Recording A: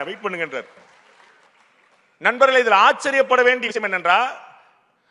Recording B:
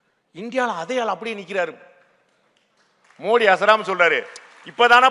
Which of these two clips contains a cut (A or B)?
A